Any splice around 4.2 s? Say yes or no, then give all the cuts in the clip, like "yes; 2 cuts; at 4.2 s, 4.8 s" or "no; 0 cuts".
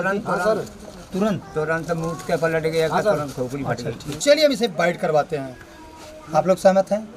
yes; 1 cut; at 4.2 s